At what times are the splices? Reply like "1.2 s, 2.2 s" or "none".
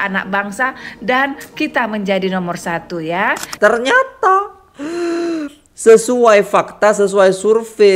3.5 s